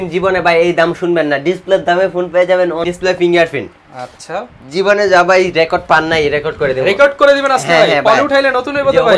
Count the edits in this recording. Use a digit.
1